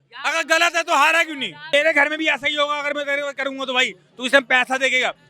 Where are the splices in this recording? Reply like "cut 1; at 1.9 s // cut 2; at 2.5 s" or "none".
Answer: cut 1; at 1.6 s